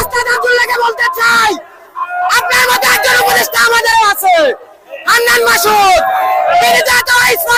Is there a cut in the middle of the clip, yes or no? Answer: no